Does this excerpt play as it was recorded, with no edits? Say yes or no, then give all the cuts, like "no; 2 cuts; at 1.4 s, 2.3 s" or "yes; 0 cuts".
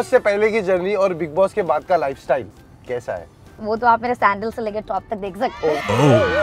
yes; 0 cuts